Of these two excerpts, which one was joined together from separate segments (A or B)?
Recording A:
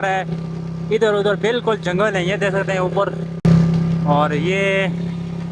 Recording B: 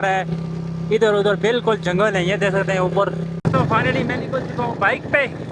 B